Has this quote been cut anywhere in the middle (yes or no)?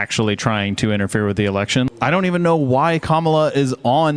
yes